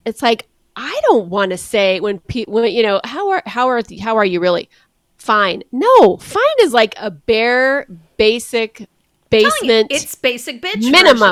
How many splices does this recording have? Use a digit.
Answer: 0